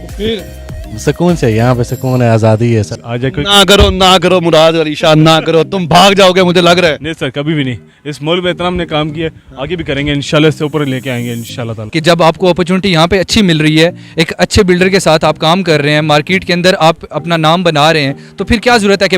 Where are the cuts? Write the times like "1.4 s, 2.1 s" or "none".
3.0 s, 11.8 s

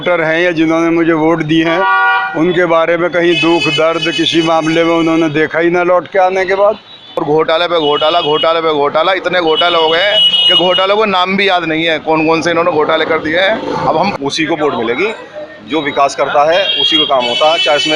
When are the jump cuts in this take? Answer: 7.2 s, 14.1 s

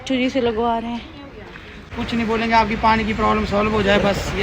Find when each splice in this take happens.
1.8 s

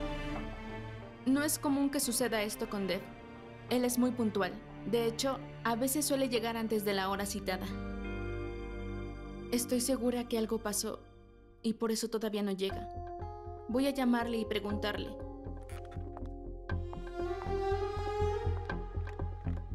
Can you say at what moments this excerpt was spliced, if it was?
none

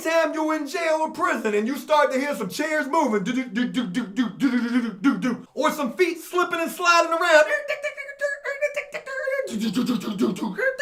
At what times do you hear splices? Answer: none

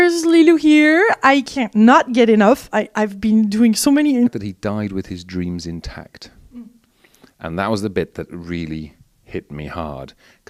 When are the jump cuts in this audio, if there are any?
none

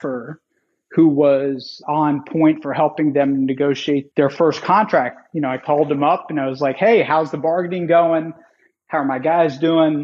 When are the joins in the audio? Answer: 1.8 s

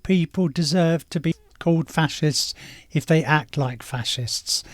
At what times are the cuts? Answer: 1.5 s

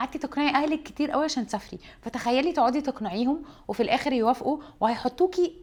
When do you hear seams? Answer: none

